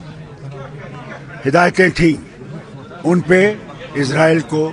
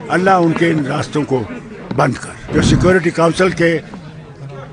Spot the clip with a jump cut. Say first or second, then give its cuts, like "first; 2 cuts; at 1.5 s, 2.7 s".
second; 1 cut; at 2.3 s